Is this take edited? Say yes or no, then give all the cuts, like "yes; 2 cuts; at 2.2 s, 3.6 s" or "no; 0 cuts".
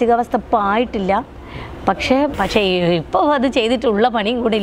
yes; 1 cut; at 2.3 s